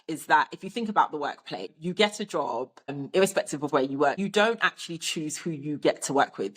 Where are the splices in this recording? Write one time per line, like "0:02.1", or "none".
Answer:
0:01.7
0:03.0
0:04.2